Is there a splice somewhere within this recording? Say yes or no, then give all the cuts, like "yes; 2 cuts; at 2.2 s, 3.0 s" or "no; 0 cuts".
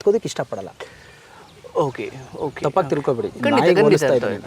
no; 0 cuts